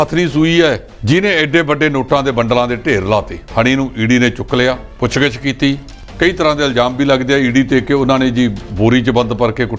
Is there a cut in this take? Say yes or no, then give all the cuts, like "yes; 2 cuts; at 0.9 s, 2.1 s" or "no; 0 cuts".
yes; 4 cuts; at 0.9 s, 3.4 s, 4.9 s, 6.0 s